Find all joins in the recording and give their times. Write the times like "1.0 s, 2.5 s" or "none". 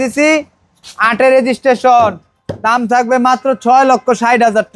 none